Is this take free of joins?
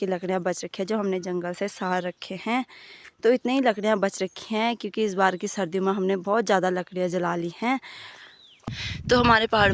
no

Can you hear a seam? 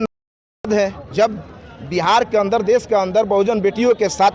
yes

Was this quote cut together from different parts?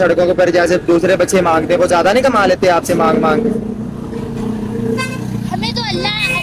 no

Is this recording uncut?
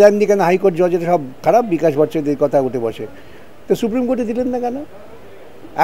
yes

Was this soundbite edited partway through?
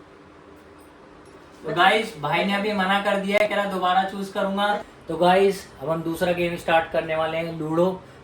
yes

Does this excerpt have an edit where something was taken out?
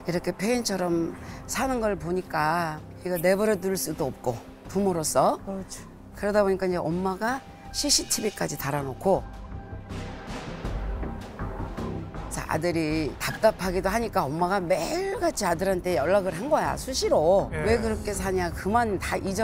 no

